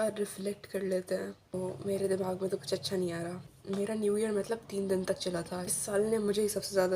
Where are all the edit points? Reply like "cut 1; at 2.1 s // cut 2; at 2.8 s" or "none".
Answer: cut 1; at 1.5 s // cut 2; at 3.5 s // cut 3; at 5.8 s

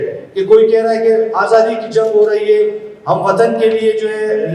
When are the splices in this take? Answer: none

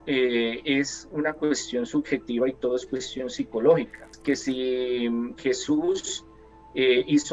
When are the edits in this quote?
cut 1; at 4.1 s

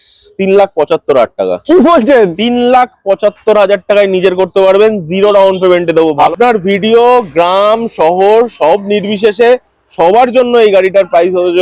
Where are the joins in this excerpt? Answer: cut 1; at 6.2 s

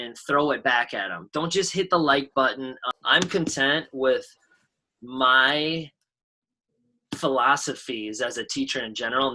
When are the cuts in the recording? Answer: cut 1; at 2.8 s

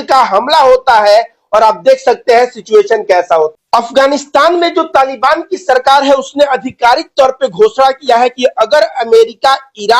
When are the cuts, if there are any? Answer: cut 1; at 3.5 s

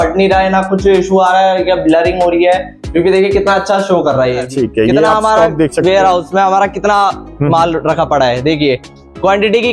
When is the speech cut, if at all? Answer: cut 1; at 4.4 s

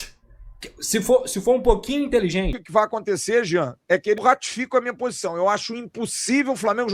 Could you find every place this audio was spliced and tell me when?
cut 1; at 2.6 s // cut 2; at 4.2 s

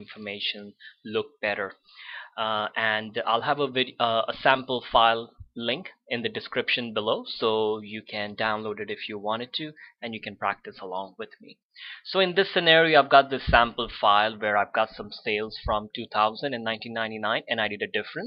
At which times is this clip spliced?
none

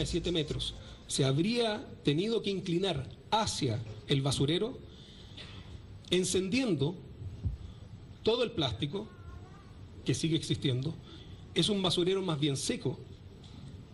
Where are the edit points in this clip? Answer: none

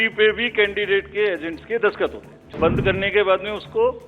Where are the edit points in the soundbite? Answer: cut 1; at 2.6 s

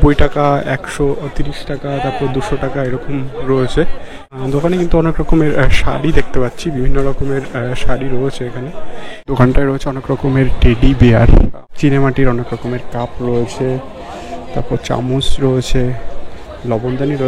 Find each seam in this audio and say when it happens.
cut 1; at 4.2 s // cut 2; at 9.2 s // cut 3; at 11.6 s

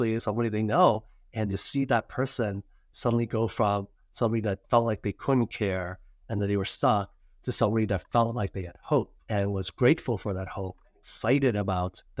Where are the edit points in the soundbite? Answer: none

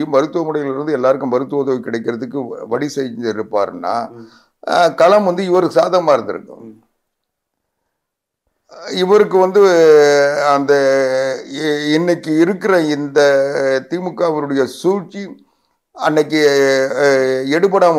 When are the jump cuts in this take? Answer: none

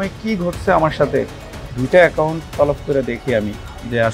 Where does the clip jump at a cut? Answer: cut 1; at 1.8 s

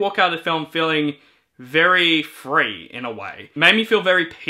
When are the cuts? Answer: cut 1; at 3.4 s

